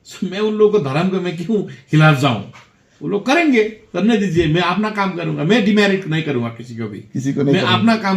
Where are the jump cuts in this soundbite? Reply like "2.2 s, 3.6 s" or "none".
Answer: none